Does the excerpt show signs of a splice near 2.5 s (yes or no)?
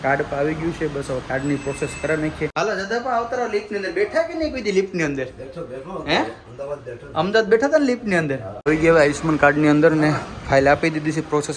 yes